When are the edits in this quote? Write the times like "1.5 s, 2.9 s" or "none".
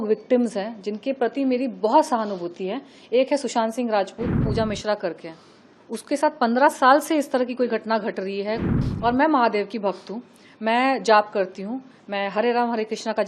4.5 s, 8.7 s